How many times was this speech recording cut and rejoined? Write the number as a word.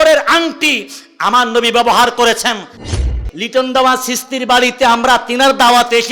one